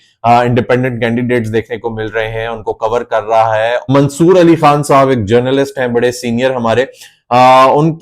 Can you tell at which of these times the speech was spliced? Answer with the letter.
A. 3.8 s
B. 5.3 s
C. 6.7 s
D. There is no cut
A